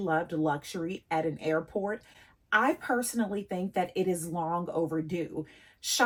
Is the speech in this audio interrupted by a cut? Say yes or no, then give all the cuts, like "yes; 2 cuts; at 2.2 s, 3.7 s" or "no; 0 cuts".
no; 0 cuts